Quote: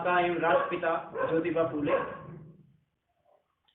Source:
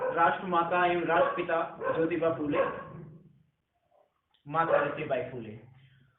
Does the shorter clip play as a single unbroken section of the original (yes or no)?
yes